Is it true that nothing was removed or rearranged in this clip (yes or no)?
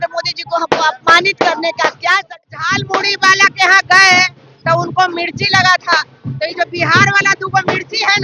no